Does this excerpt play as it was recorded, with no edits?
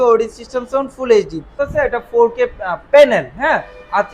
no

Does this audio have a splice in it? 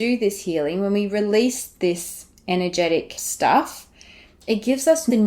yes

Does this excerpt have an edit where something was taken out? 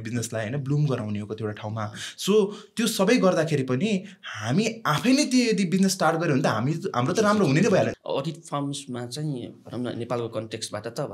yes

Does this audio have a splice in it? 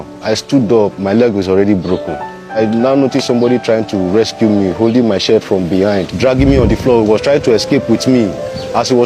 yes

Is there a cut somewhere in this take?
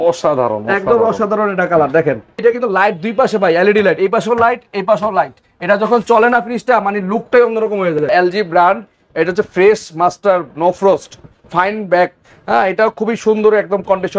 yes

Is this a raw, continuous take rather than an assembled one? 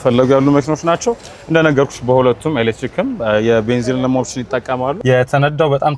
no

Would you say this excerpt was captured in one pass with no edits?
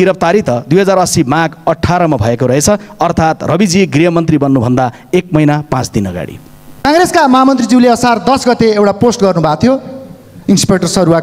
no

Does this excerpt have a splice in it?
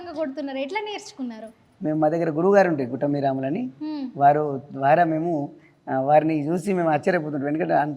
no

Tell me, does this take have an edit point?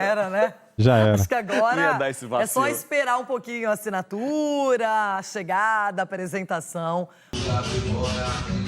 yes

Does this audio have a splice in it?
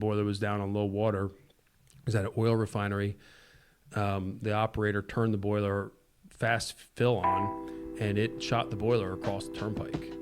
no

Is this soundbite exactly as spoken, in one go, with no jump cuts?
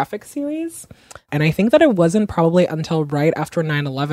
no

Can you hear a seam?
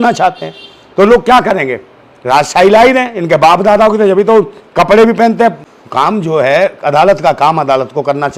yes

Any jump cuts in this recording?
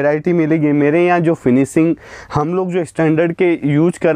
no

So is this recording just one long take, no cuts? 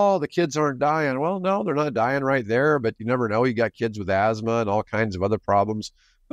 yes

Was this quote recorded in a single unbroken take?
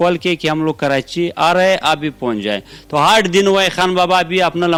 yes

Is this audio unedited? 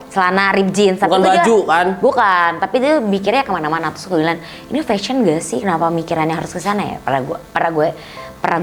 yes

